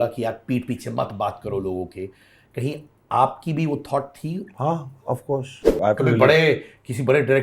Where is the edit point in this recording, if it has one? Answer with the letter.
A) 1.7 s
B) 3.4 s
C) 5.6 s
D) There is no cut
C